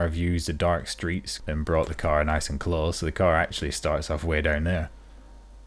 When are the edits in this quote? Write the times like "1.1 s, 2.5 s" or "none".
1.3 s